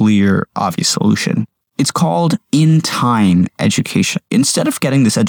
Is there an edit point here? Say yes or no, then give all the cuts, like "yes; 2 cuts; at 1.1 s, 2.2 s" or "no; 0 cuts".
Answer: yes; 2 cuts; at 1.6 s, 4.3 s